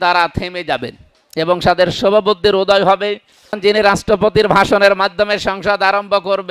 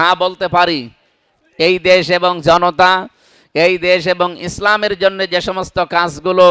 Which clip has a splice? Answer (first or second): first